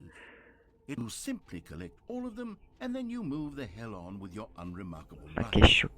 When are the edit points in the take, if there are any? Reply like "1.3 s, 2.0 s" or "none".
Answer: 1.0 s

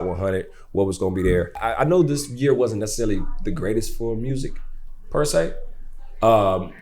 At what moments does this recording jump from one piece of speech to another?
1.6 s

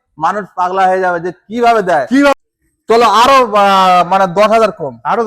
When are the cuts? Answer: 2.3 s

